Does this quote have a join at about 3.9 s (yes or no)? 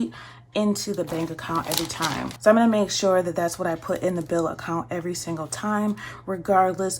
no